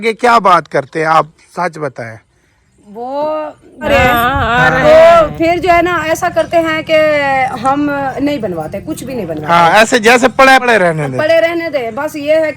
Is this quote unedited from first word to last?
no; 2 cuts; at 3.8 s, 10.6 s

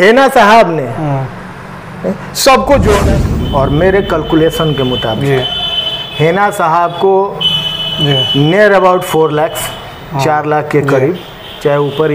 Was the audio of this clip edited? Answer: yes; 1 cut; at 3.0 s

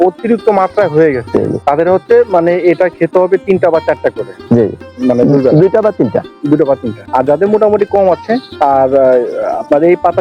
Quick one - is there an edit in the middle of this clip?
yes; 3 cuts; at 1.6 s, 6.9 s, 8.5 s

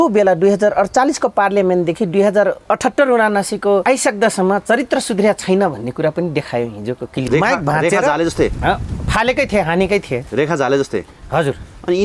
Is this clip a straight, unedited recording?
no; 3 cuts; at 2.6 s, 3.8 s, 7.3 s

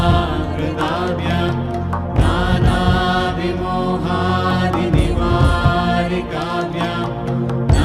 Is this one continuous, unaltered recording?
yes; 0 cuts

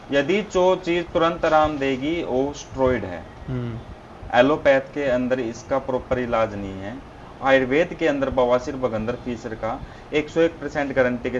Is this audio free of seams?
yes; 0 cuts

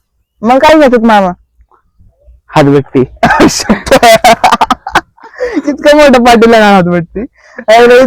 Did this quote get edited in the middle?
no; 0 cuts

